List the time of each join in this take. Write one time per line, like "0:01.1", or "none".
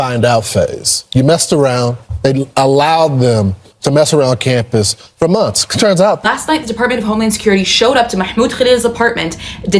0:06.2